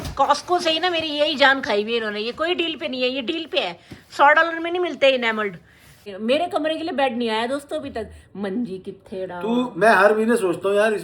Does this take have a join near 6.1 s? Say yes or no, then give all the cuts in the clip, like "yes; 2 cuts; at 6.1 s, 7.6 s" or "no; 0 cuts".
yes; 1 cut; at 6.1 s